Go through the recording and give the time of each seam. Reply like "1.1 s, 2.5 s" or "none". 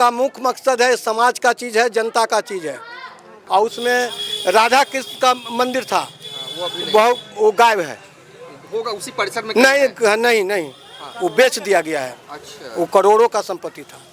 3.3 s